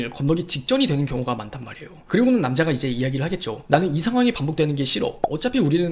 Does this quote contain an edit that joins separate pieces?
no; 0 cuts

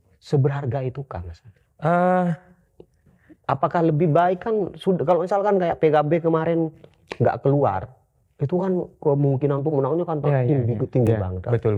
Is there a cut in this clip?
no; 0 cuts

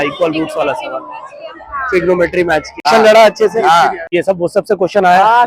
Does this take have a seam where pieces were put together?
yes; 2 cuts; at 2.8 s, 4.1 s

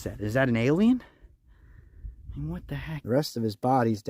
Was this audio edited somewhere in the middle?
yes; 1 cut; at 3.0 s

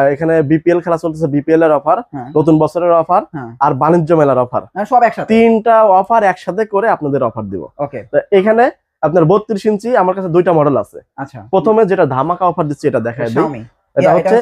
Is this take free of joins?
yes; 0 cuts

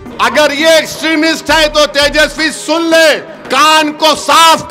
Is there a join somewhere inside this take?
yes; 1 cut; at 3.3 s

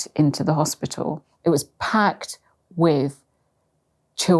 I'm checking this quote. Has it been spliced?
yes; 1 cut; at 1.3 s

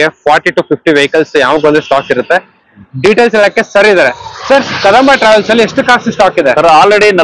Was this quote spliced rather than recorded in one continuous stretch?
no; 0 cuts

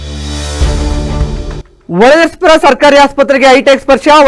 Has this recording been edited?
no; 0 cuts

